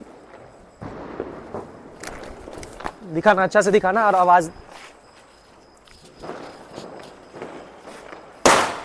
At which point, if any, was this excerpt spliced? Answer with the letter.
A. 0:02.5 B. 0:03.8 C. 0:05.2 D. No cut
D